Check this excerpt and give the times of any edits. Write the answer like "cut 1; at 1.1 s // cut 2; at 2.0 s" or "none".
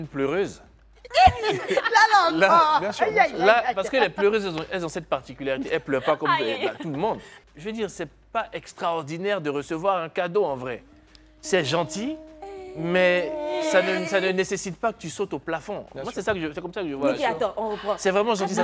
cut 1; at 7.3 s